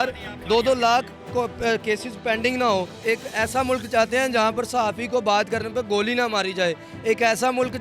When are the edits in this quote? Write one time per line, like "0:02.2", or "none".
0:02.9

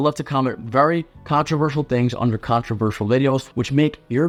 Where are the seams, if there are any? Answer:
none

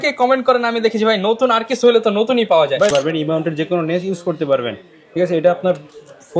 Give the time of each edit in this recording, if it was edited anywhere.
0:02.9

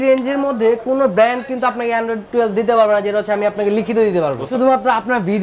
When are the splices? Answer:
0:04.5

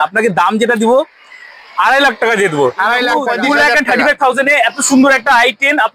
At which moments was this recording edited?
0:03.3

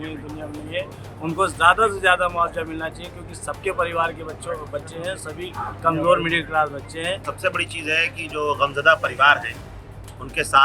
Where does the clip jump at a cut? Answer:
0:07.3

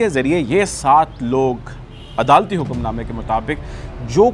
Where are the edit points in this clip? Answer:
none

